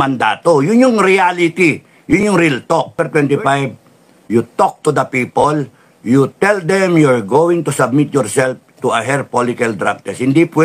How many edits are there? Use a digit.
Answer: 1